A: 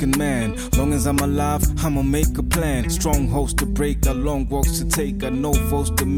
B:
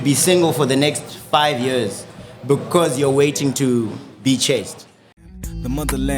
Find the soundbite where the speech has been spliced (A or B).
B